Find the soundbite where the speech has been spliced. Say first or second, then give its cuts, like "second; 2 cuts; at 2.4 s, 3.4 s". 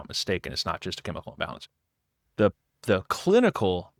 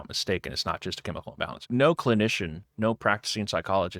second; 1 cut; at 1.6 s